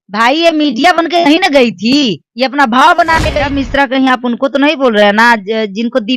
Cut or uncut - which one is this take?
cut